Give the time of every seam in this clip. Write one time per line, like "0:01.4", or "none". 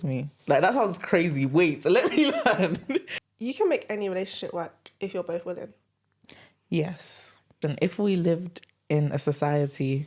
0:03.2
0:07.6